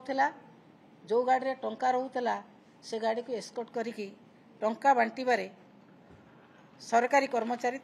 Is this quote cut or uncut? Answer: uncut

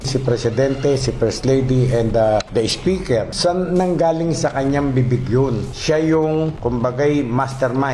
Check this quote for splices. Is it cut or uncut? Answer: uncut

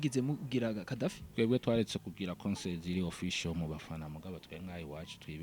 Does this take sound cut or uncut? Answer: cut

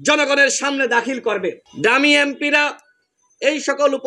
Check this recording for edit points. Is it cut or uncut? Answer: cut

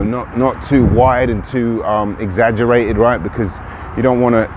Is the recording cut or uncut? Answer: uncut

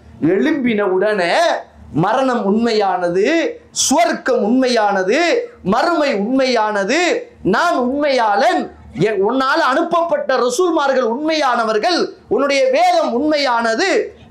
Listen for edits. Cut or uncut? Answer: uncut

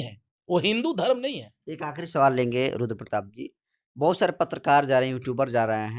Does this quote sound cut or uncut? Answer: uncut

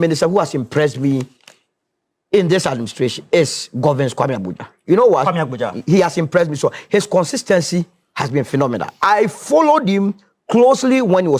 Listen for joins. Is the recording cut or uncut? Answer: uncut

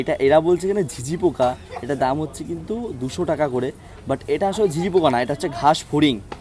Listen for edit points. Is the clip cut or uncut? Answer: uncut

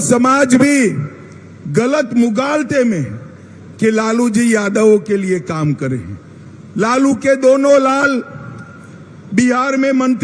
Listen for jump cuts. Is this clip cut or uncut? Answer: uncut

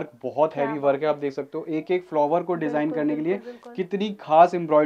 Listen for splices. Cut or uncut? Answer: uncut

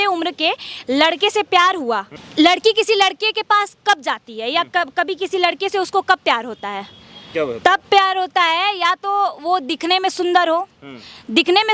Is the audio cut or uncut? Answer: cut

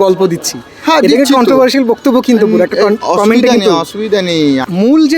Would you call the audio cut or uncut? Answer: cut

